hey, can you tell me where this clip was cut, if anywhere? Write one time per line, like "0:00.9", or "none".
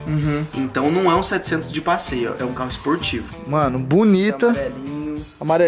0:03.3